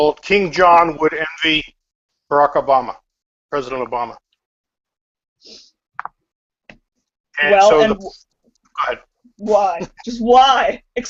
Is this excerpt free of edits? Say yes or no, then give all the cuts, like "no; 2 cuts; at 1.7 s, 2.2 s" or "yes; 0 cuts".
yes; 0 cuts